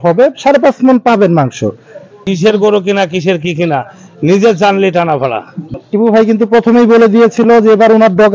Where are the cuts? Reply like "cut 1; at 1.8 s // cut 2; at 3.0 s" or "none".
cut 1; at 2.3 s // cut 2; at 5.7 s